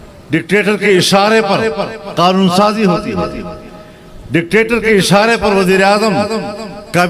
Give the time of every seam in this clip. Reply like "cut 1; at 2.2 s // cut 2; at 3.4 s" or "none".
none